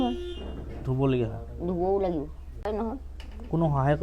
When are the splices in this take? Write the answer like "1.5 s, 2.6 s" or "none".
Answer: 2.7 s